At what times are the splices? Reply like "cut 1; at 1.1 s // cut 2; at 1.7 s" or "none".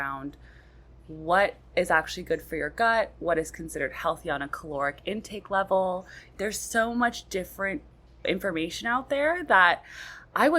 cut 1; at 6.3 s // cut 2; at 8.2 s